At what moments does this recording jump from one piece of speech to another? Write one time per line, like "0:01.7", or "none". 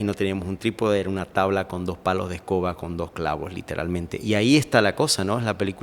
0:04.1

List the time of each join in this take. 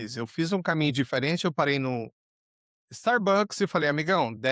none

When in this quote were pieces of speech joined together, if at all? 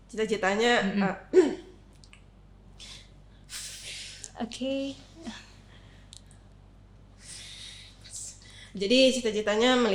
none

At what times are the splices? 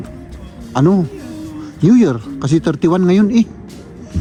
none

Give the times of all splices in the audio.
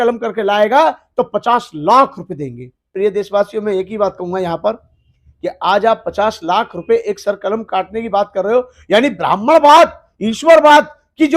0:02.9

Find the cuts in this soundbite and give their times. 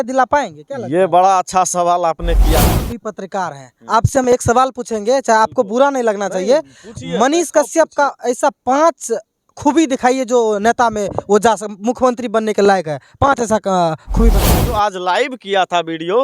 0:02.5
0:14.4

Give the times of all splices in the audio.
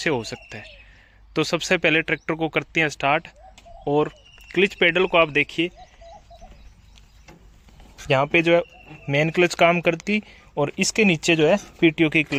none

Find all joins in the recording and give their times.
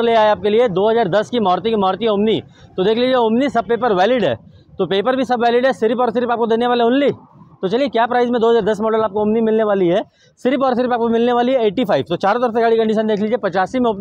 none

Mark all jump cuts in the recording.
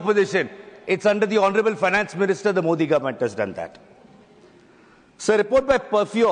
none

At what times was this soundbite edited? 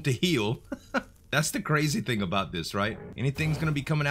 0:01.2
0:03.1

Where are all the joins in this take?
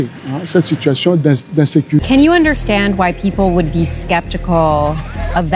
0:02.0

